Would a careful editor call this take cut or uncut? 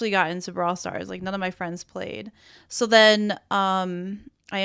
uncut